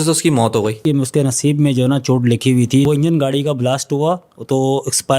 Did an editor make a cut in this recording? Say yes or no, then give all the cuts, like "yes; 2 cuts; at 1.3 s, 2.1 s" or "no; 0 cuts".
yes; 2 cuts; at 0.8 s, 2.8 s